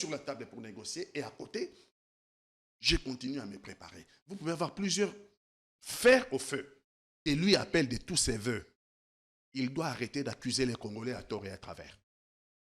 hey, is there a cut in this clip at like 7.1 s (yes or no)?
yes